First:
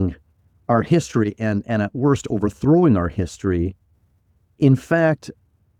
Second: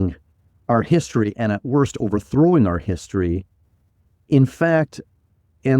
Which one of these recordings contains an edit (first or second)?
second